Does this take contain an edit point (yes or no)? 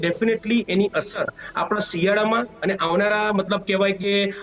no